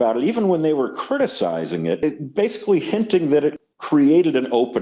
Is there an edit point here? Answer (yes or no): yes